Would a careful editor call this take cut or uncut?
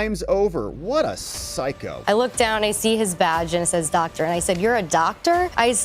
cut